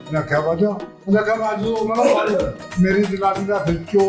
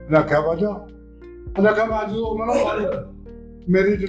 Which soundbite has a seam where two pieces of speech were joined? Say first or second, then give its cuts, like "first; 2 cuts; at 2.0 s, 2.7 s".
first; 2 cuts; at 0.9 s, 2.6 s